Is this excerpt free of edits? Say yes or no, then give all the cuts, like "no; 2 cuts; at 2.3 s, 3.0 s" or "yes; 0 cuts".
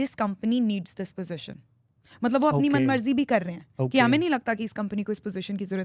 yes; 0 cuts